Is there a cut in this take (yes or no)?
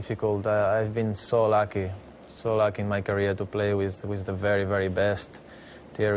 yes